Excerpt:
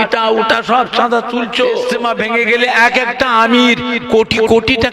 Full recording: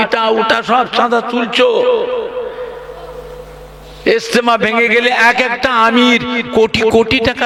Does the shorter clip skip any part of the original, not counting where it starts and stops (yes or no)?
yes